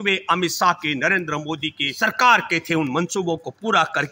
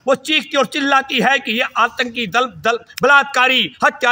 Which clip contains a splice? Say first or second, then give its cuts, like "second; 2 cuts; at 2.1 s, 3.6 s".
first; 1 cut; at 1.9 s